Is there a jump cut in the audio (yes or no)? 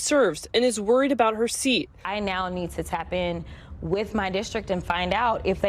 yes